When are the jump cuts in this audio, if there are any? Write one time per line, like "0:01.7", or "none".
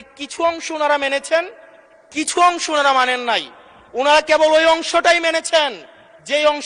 none